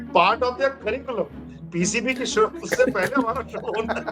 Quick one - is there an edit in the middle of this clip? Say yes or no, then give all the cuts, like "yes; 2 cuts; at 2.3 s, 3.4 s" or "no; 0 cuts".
no; 0 cuts